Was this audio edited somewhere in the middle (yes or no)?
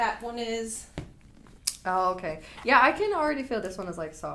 no